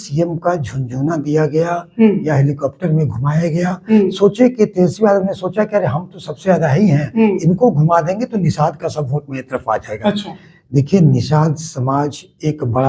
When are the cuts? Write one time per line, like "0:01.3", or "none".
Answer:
none